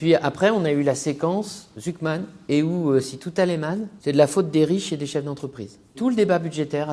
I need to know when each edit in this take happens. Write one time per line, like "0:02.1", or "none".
0:02.3
0:03.9
0:05.9